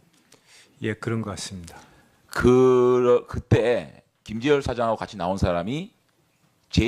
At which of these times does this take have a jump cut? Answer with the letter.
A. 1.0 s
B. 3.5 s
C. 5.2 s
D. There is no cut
D